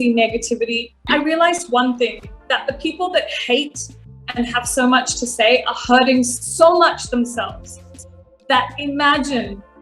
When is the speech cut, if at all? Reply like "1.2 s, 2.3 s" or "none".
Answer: 1.1 s

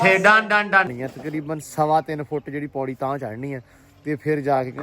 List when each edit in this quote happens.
1.0 s

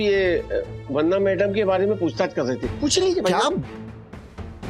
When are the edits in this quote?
none

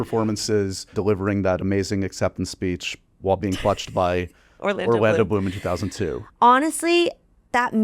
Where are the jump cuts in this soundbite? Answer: 0.9 s

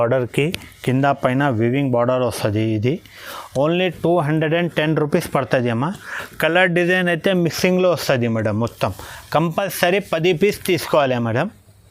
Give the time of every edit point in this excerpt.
none

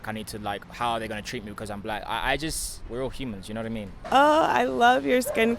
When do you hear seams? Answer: 4.0 s

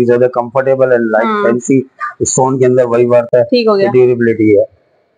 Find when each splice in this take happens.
none

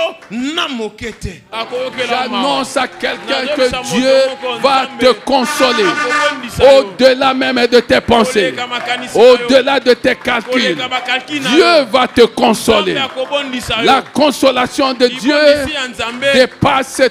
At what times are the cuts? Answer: 1.4 s

